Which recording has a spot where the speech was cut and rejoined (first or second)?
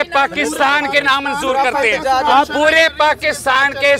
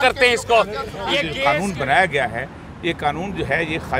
second